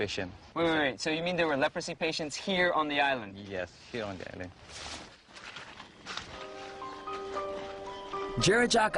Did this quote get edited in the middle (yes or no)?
yes